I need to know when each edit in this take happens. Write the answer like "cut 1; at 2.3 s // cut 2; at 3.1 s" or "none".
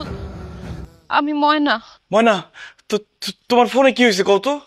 cut 1; at 0.9 s // cut 2; at 1.9 s